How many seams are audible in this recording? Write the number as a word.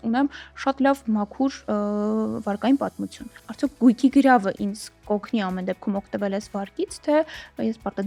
zero